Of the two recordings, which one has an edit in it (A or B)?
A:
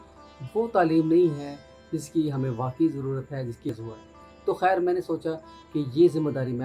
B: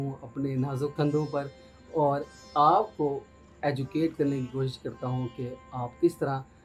A